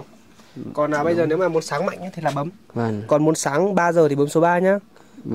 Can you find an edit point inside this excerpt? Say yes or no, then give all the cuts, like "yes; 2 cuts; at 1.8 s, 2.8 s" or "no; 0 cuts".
yes; 1 cut; at 2.5 s